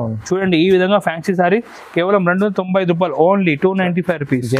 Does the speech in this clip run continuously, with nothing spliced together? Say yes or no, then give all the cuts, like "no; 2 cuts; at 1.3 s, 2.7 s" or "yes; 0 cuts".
yes; 0 cuts